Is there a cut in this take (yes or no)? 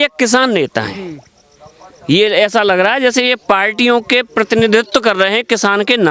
no